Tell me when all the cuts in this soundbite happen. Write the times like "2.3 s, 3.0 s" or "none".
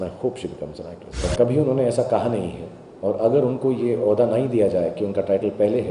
1.2 s

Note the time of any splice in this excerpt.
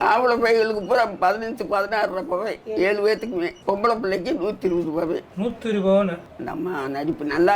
6.2 s

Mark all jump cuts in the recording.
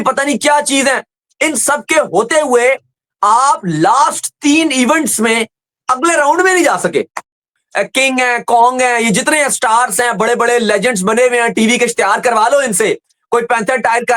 7.6 s

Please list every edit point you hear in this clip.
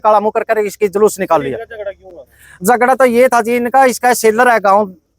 none

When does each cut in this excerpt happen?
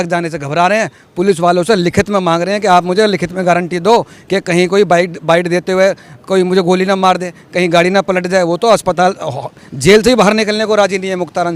none

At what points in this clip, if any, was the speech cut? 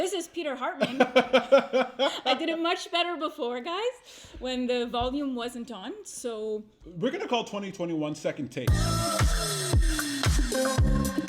8.7 s

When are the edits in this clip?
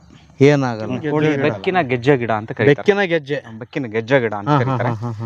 1.2 s

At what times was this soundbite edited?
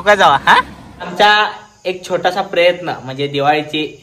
1.1 s

